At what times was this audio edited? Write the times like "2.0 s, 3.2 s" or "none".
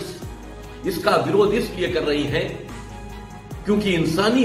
none